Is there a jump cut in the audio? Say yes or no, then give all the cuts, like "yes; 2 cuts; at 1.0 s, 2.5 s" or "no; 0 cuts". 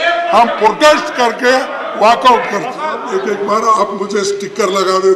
yes; 1 cut; at 3.0 s